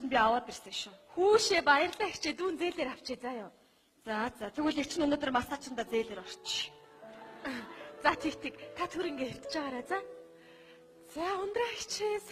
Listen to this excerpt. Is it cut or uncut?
uncut